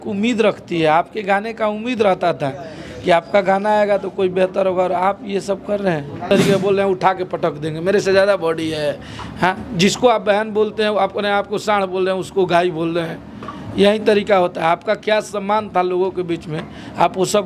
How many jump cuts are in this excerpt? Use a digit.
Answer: 1